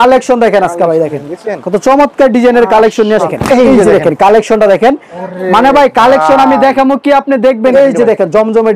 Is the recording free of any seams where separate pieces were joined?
no; 2 cuts; at 3.2 s, 7.7 s

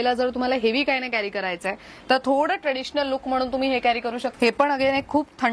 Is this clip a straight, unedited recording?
no; 1 cut; at 4.3 s

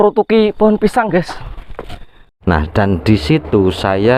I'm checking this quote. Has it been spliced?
yes; 1 cut; at 2.3 s

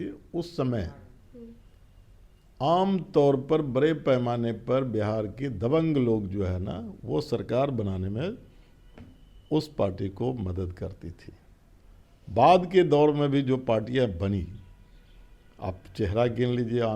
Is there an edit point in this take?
no; 0 cuts

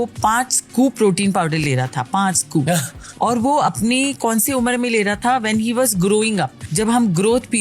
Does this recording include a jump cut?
yes; 2 cuts; at 3.0 s, 6.6 s

